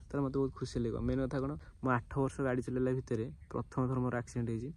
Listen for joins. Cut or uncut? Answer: cut